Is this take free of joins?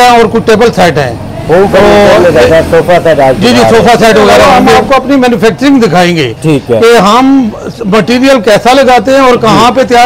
no; 1 cut; at 4.7 s

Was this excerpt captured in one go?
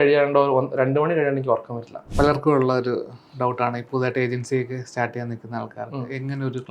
no; 1 cut; at 2.0 s

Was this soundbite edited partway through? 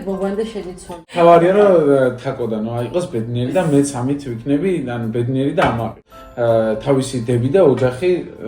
yes; 2 cuts; at 1.0 s, 6.0 s

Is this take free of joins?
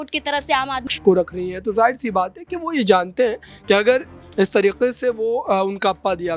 no; 1 cut; at 0.9 s

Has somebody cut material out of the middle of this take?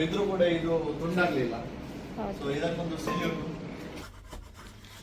yes; 1 cut; at 4.0 s

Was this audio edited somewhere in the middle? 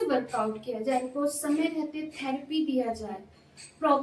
no; 0 cuts

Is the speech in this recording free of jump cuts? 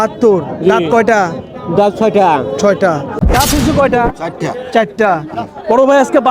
no; 1 cut; at 3.2 s

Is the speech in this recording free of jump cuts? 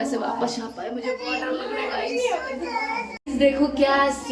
no; 1 cut; at 3.2 s

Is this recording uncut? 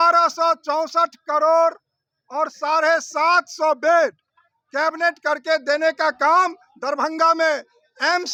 yes; 0 cuts

